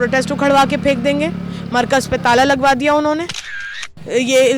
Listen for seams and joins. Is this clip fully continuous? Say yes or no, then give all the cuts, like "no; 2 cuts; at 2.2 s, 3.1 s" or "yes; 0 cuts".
no; 1 cut; at 3.4 s